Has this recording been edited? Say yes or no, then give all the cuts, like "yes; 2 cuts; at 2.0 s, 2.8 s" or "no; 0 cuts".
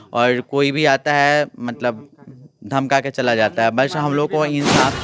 no; 0 cuts